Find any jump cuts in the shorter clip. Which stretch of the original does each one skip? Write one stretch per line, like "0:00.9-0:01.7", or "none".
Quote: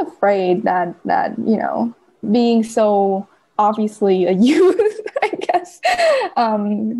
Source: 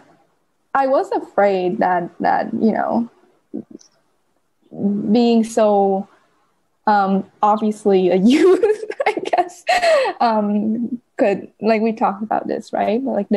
0:03.4-0:05.0
0:06.3-0:07.3